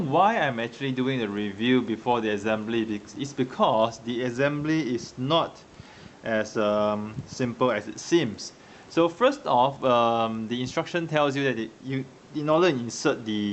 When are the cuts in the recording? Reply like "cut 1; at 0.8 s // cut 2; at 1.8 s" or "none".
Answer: none